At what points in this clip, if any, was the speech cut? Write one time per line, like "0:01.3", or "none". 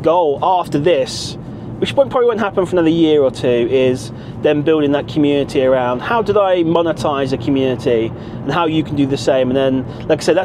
none